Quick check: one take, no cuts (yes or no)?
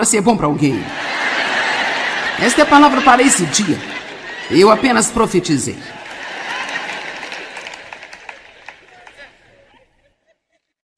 no